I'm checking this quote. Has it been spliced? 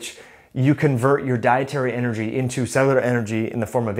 no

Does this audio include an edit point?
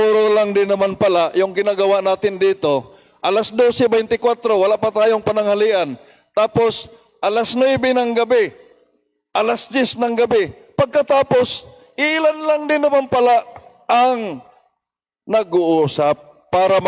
no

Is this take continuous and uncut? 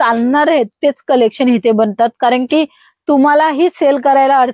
yes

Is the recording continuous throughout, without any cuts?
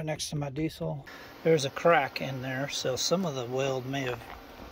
no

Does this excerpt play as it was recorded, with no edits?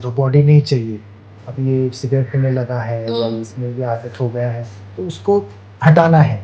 yes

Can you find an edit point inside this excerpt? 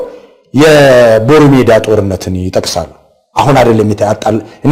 no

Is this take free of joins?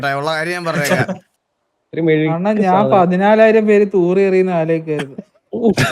no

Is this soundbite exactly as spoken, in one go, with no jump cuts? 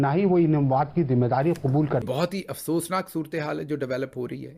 no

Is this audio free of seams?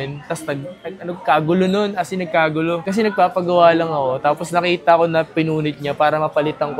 yes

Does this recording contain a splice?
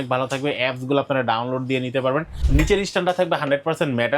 yes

